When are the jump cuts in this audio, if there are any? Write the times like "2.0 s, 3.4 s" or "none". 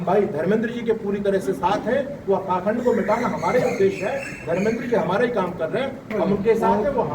none